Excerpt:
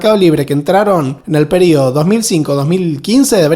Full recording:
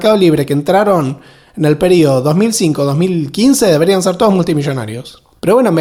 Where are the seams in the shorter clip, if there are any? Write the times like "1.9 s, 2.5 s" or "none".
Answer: 1.2 s